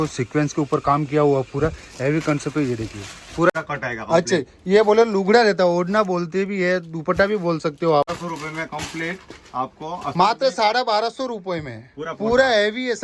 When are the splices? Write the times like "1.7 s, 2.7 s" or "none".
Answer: 3.5 s, 8.1 s